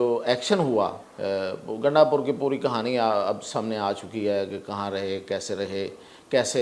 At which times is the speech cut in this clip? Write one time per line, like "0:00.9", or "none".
0:01.1